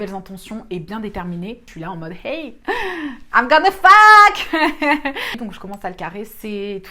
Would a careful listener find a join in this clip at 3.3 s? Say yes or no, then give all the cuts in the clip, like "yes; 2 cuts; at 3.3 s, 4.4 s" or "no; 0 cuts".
no; 2 cuts; at 1.6 s, 5.3 s